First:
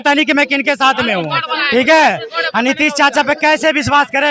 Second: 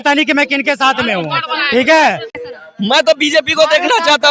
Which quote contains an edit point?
second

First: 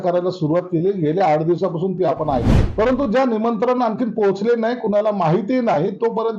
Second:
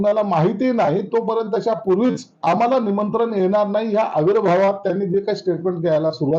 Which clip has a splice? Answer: first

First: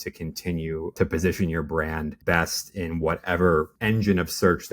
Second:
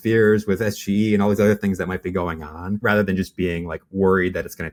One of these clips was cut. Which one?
first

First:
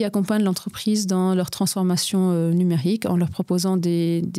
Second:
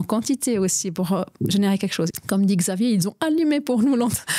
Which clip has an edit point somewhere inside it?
second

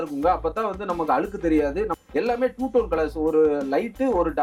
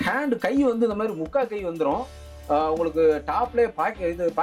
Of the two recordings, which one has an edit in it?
first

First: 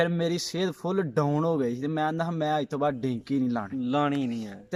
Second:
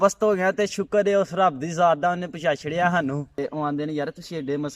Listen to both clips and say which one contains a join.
second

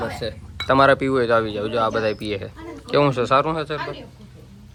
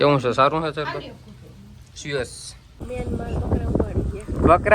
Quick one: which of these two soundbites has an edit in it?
second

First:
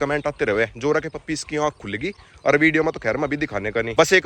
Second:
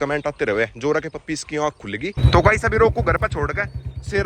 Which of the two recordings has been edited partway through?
second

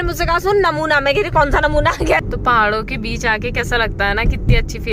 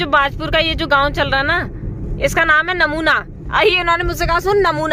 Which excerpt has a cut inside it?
first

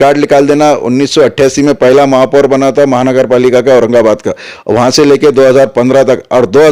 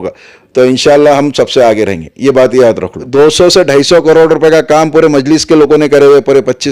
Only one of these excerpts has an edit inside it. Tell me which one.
second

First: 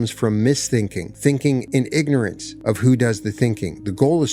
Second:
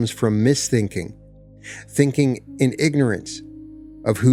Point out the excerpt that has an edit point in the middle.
first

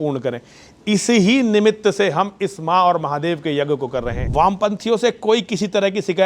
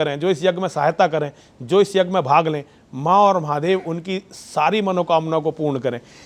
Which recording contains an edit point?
first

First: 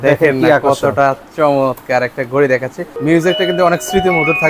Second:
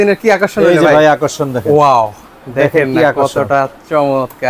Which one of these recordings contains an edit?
first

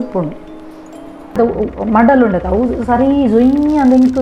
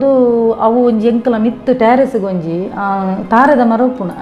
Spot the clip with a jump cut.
first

